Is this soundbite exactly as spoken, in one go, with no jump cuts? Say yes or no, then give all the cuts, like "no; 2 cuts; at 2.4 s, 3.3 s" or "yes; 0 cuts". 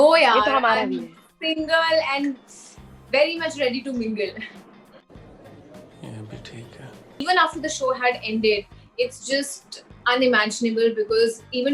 no; 1 cut; at 7.2 s